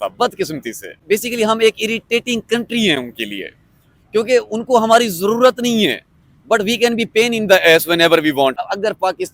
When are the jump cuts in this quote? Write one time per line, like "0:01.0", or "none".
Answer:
0:00.9
0:08.6